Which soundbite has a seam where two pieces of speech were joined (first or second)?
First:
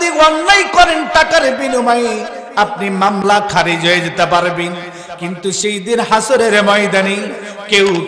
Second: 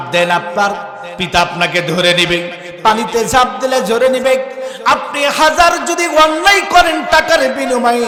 first